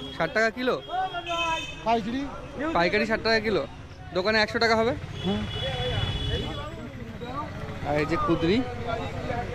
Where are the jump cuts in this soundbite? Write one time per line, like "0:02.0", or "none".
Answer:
none